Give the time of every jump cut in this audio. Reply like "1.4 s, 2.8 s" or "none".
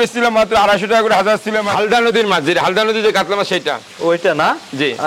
1.7 s